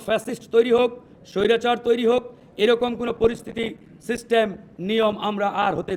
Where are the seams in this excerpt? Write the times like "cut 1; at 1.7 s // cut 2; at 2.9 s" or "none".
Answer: none